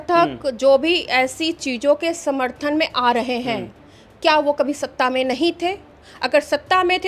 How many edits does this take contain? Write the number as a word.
zero